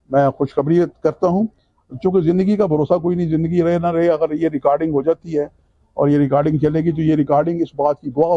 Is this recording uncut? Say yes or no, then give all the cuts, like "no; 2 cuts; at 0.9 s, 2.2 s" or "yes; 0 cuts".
yes; 0 cuts